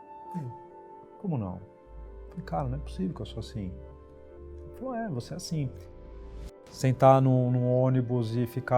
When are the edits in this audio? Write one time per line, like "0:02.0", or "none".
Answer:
0:01.8
0:06.2